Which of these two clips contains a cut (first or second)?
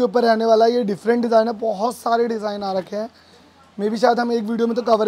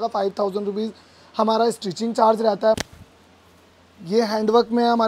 second